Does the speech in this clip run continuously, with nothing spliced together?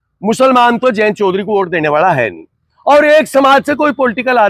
yes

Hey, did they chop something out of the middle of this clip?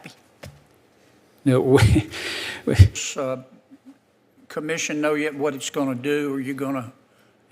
yes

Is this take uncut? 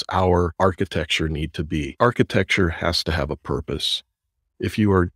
no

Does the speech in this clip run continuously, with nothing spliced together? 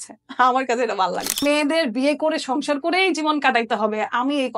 no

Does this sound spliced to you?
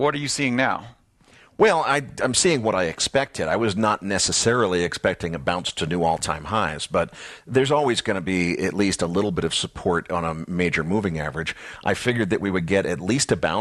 no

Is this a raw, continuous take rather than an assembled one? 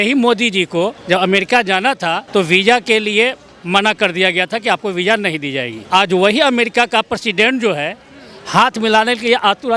no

